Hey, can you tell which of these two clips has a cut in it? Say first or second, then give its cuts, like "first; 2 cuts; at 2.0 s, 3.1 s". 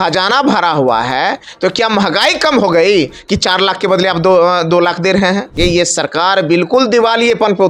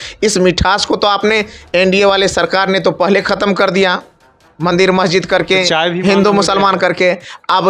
first; 1 cut; at 5.5 s